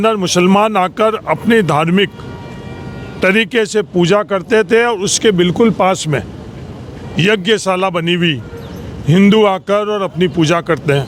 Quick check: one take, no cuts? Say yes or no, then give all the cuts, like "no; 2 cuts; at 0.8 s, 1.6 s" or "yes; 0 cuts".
yes; 0 cuts